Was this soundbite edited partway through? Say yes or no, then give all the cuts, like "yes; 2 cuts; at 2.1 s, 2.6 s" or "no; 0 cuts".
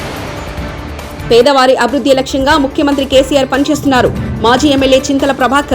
yes; 1 cut; at 1.2 s